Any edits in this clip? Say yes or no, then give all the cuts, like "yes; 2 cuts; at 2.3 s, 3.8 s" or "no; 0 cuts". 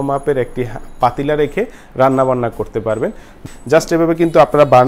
yes; 1 cut; at 3.4 s